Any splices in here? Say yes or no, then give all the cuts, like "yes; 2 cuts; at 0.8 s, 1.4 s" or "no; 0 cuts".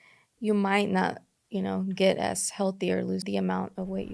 yes; 1 cut; at 3.2 s